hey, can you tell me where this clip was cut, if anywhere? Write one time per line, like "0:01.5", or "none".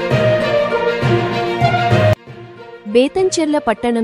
0:02.3